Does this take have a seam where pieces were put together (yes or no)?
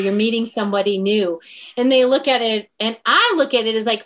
no